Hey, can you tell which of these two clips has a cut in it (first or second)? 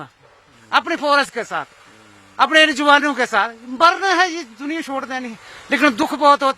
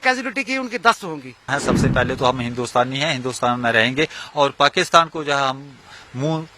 second